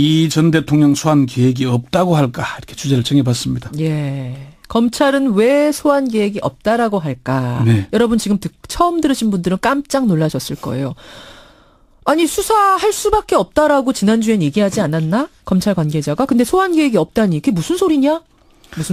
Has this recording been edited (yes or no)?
no